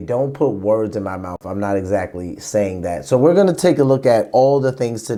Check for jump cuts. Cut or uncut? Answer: uncut